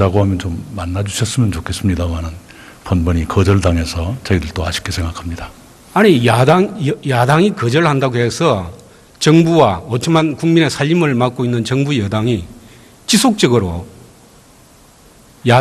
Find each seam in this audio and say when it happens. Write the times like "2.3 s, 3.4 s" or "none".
7.9 s

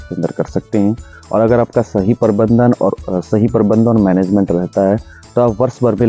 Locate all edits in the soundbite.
none

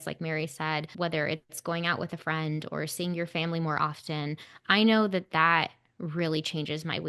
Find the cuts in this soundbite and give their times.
0.9 s

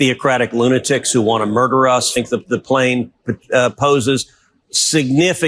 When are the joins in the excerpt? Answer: 2.2 s

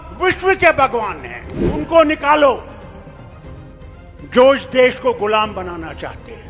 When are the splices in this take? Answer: 1.8 s, 2.7 s, 4.2 s

